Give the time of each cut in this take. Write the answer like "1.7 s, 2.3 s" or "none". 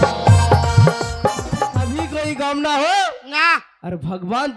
1.8 s